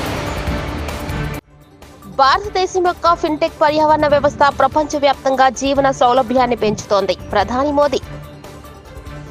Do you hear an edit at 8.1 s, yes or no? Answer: yes